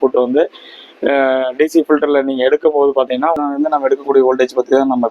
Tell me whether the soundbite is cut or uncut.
cut